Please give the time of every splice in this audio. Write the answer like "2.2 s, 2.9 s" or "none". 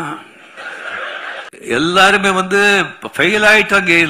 1.5 s